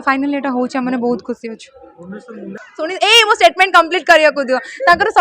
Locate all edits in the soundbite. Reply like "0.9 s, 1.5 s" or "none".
2.6 s

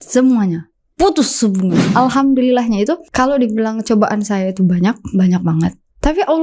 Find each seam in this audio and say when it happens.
1.9 s, 3.1 s

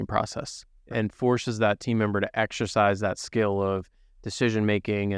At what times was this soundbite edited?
0.9 s

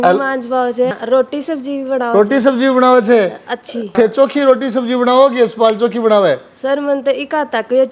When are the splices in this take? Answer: 0.9 s, 3.9 s

